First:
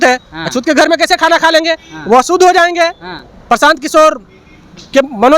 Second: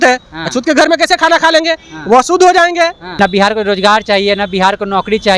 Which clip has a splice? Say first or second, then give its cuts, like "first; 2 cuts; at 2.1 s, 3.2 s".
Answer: second; 1 cut; at 3.0 s